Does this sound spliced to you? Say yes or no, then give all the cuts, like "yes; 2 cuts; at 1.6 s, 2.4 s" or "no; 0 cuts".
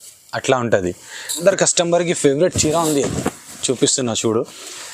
yes; 1 cut; at 1.4 s